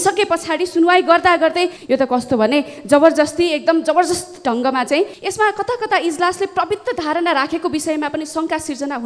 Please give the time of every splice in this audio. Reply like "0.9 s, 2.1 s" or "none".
1.8 s, 5.2 s